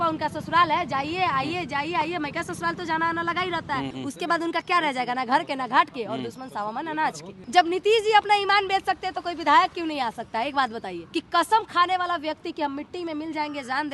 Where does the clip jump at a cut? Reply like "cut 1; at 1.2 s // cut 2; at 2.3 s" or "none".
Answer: cut 1; at 4.0 s // cut 2; at 7.4 s // cut 3; at 11.0 s